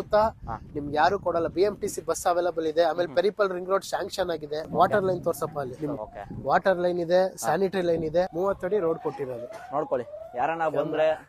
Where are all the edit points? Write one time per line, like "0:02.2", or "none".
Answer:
0:04.7
0:08.3